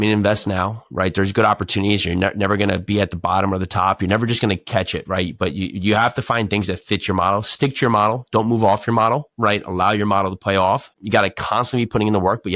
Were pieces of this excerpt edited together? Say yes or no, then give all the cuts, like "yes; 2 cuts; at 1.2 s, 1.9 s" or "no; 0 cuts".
no; 0 cuts